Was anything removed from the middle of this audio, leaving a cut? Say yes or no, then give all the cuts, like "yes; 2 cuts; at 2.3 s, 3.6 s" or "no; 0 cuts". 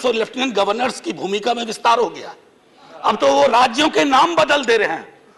no; 0 cuts